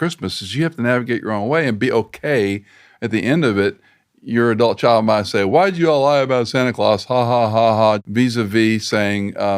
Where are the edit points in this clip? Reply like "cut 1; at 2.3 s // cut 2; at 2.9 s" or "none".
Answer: cut 1; at 8.0 s

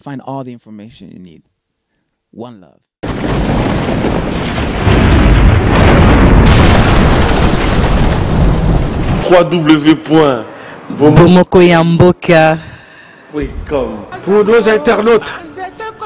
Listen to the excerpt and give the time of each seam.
cut 1; at 9.2 s

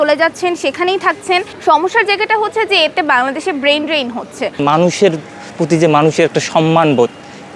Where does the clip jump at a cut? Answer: cut 1; at 1.5 s // cut 2; at 4.5 s

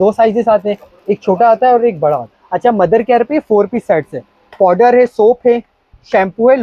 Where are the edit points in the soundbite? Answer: cut 1; at 2.4 s

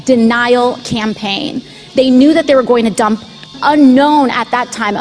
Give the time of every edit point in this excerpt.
cut 1; at 3.5 s

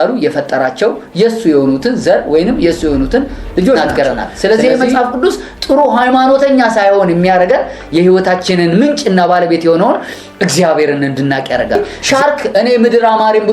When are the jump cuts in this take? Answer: cut 1; at 3.8 s // cut 2; at 11.8 s

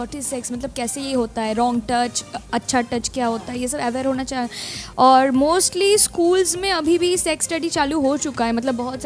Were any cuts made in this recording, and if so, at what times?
none

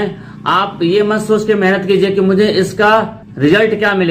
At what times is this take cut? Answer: cut 1; at 3.2 s

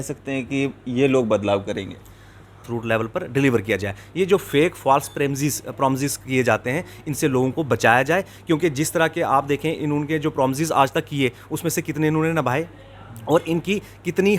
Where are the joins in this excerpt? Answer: cut 1; at 2.6 s

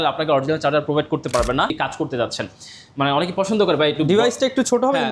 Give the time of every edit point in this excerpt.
cut 1; at 1.7 s

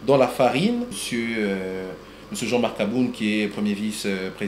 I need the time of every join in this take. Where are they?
cut 1; at 1.0 s

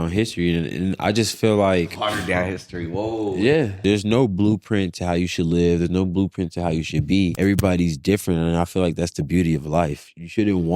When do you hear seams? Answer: cut 1; at 3.8 s // cut 2; at 7.3 s

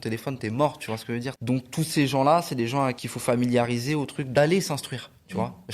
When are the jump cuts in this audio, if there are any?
cut 1; at 1.4 s // cut 2; at 3.1 s // cut 3; at 4.3 s

